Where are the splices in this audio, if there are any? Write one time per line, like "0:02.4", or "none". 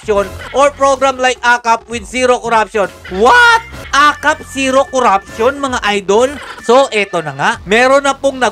0:03.8
0:06.5